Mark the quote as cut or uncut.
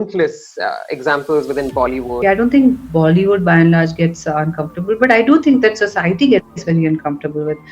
cut